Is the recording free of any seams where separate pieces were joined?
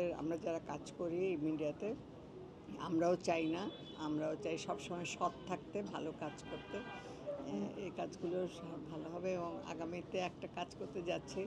yes; 0 cuts

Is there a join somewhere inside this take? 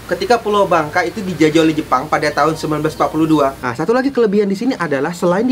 yes; 1 cut; at 3.6 s

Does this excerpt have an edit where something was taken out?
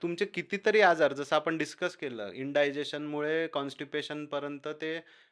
no; 0 cuts

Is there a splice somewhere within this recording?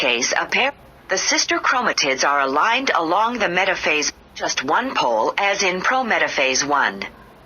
yes; 2 cuts; at 0.9 s, 4.3 s

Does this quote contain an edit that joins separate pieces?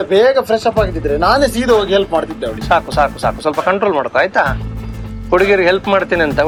no; 0 cuts

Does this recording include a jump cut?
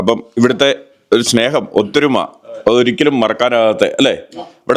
no; 0 cuts

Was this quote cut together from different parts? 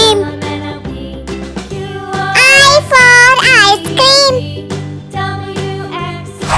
no; 0 cuts

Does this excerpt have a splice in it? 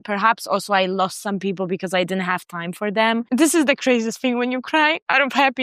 yes; 1 cut; at 3.3 s

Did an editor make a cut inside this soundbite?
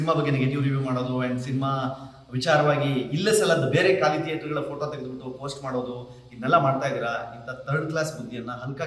no; 0 cuts

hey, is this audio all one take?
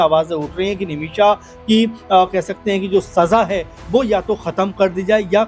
yes; 0 cuts

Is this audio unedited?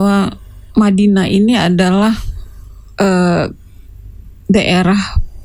yes; 0 cuts

